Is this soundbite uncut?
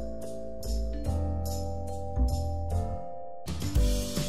no; 1 cut; at 3.4 s

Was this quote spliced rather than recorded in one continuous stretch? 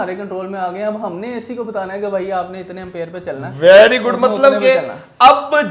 no; 0 cuts

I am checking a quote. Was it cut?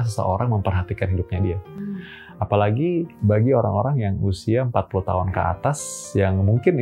yes; 1 cut; at 3.1 s

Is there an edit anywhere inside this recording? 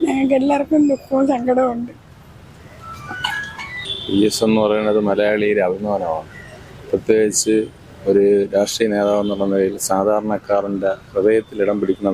yes; 1 cut; at 3.9 s

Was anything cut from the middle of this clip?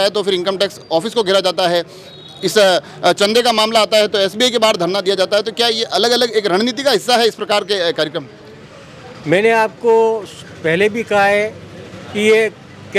no; 0 cuts

